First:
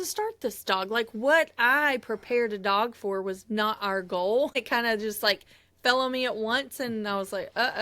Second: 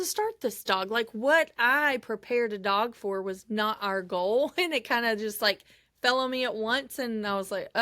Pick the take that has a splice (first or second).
first